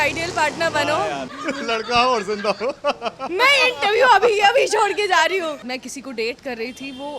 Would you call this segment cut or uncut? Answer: cut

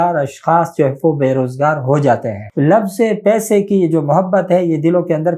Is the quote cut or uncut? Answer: cut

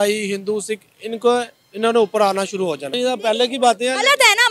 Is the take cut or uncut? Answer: cut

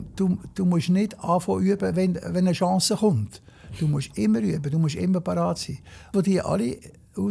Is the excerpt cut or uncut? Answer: cut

